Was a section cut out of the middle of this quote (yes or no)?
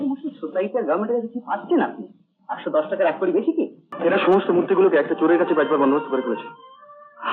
yes